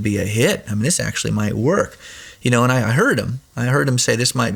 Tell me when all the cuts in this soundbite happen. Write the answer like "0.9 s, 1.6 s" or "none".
none